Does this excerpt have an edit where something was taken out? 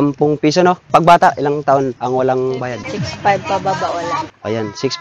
yes; 3 cuts; at 0.8 s, 2.0 s, 2.8 s

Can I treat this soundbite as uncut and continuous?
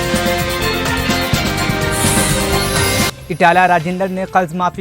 no; 1 cut; at 3.1 s

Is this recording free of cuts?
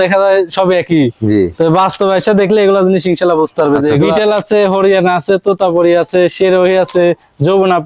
no; 1 cut; at 4.1 s

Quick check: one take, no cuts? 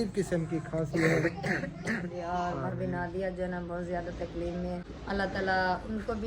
no; 2 cuts; at 2.1 s, 4.9 s

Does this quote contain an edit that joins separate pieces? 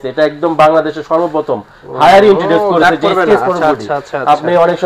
no; 0 cuts

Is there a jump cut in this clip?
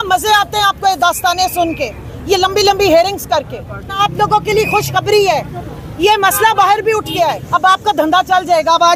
yes; 2 cuts; at 4.0 s, 7.4 s

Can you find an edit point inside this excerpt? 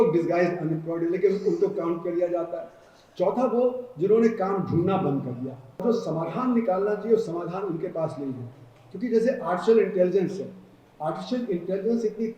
yes; 1 cut; at 5.8 s

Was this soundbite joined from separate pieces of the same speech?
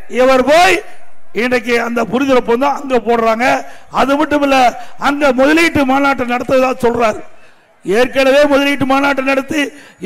no; 0 cuts

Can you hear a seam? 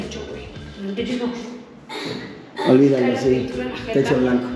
no; 0 cuts

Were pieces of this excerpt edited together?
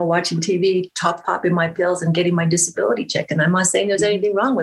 no; 0 cuts

